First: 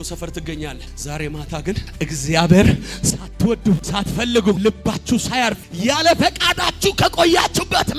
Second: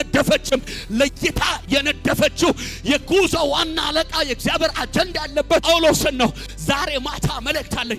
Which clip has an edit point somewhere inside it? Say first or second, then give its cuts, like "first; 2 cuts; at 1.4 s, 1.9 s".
first; 4 cuts; at 0.9 s, 1.9 s, 3.9 s, 5.7 s